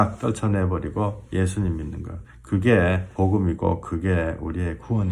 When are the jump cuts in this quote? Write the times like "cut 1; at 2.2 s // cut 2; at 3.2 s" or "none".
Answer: cut 1; at 3.1 s